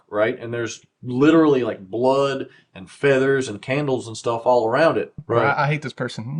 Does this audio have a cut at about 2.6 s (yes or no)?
no